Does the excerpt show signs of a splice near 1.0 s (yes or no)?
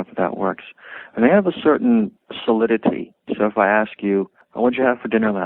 no